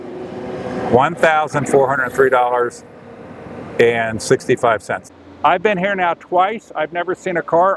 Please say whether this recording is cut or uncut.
cut